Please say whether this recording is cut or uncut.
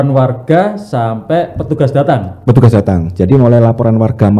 uncut